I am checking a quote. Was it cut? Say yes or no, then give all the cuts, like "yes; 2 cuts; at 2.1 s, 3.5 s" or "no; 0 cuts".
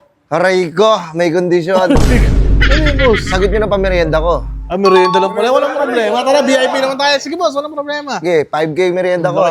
no; 0 cuts